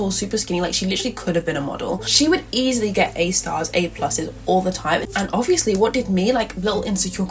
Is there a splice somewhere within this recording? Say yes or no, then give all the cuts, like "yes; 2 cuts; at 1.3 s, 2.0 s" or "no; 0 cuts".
yes; 2 cuts; at 2.1 s, 5.1 s